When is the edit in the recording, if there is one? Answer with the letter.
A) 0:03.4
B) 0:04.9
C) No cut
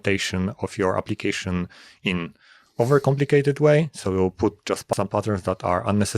B